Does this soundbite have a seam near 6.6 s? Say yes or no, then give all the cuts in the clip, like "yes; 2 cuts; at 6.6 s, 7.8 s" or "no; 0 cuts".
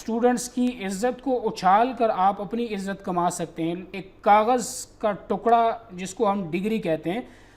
no; 1 cut; at 3.9 s